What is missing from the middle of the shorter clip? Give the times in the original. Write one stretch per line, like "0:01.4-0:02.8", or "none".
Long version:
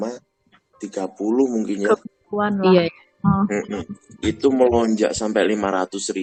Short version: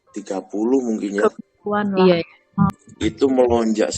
0:03.4-0:03.9